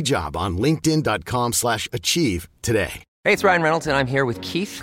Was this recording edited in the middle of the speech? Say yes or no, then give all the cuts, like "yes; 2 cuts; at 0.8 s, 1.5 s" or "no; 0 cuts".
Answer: yes; 1 cut; at 3.0 s